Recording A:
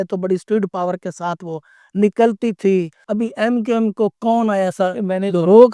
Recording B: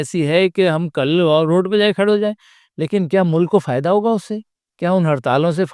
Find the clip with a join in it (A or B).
A